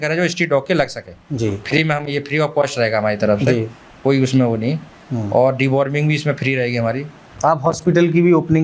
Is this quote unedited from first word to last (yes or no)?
yes